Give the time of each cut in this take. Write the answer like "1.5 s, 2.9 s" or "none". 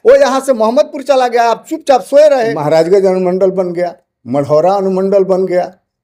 2.6 s

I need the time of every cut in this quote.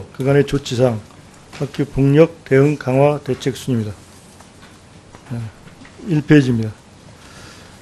none

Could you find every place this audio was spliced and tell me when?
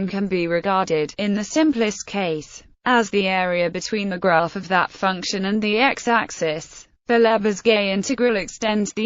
none

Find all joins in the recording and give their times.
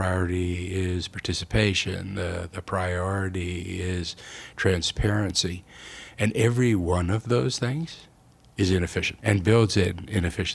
9.1 s

